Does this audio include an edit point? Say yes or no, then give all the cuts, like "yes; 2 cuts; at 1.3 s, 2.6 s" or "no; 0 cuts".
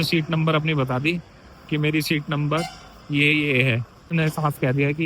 yes; 1 cut; at 4.1 s